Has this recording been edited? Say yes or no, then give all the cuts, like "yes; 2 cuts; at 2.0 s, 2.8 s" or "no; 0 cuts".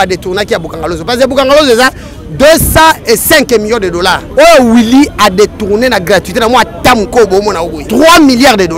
yes; 2 cuts; at 4.2 s, 7.8 s